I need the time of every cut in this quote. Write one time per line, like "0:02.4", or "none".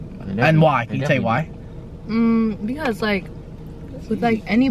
none